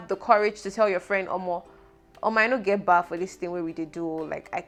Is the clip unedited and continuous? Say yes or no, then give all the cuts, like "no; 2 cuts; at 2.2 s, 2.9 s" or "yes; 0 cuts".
yes; 0 cuts